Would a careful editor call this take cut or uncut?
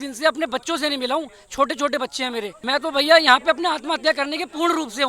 cut